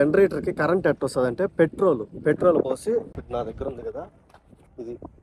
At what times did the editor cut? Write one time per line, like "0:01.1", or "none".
none